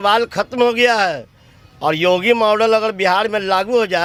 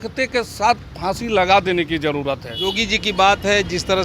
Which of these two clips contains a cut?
second; 1 cut; at 2.6 s

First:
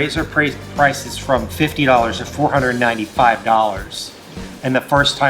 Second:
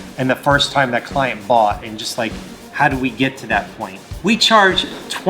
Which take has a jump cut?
second; 1 cut; at 4.1 s

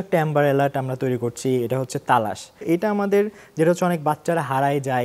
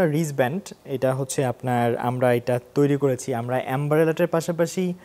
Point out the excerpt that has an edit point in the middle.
first; 1 cut; at 2.6 s

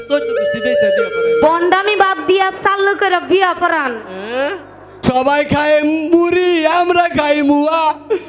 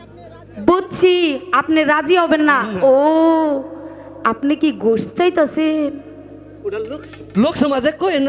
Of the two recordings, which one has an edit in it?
first; 1 cut; at 5.0 s

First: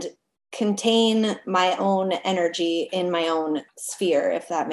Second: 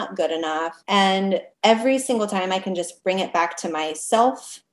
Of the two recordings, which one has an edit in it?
second; 1 cut; at 1.5 s

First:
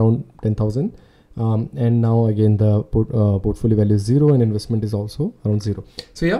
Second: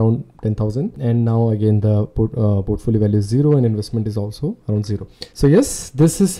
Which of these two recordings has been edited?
second; 2 cuts; at 1.0 s, 5.3 s

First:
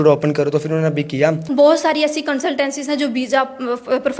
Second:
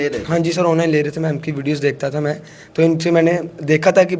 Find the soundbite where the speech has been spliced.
first; 1 cut; at 1.4 s

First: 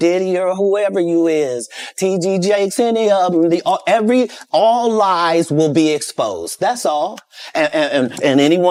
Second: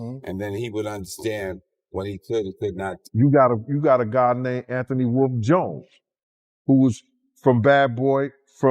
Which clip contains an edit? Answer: second; 1 cut; at 2.9 s

